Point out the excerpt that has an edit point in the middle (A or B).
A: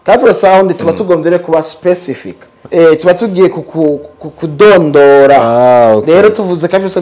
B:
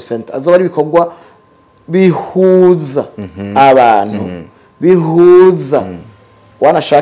A